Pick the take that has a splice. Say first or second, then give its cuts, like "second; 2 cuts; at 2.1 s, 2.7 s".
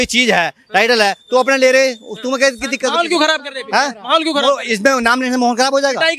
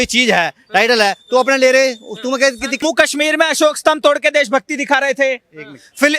second; 1 cut; at 2.8 s